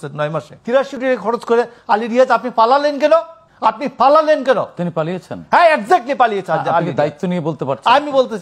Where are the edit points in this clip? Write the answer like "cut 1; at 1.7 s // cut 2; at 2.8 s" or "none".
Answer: cut 1; at 0.9 s // cut 2; at 3.4 s